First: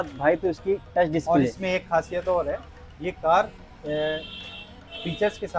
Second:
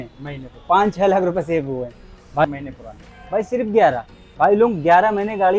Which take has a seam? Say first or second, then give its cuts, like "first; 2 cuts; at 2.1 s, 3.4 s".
second; 1 cut; at 2.4 s